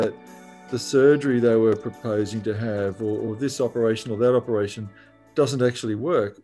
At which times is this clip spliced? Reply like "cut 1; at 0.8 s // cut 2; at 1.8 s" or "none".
none